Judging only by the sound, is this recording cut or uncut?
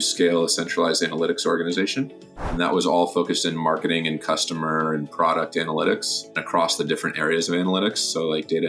cut